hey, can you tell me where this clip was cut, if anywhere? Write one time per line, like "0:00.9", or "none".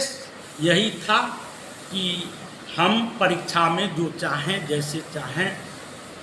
none